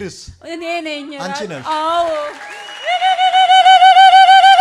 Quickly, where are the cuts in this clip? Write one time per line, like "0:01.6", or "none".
none